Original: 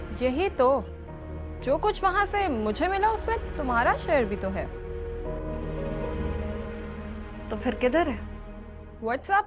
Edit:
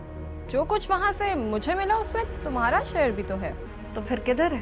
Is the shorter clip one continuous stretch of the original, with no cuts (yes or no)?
no